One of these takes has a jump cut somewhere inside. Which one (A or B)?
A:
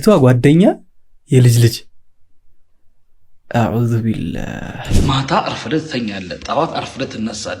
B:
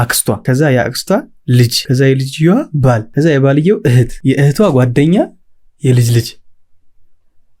A